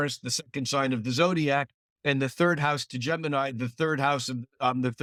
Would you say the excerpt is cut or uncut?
uncut